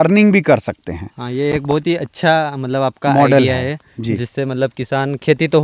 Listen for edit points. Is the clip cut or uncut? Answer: uncut